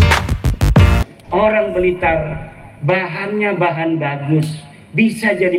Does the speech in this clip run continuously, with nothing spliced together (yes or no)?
no